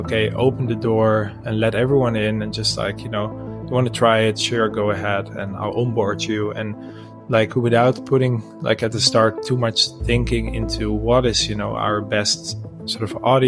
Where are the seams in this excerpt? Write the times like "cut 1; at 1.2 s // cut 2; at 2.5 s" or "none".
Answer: none